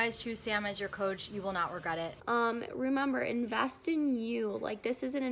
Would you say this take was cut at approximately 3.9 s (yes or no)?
no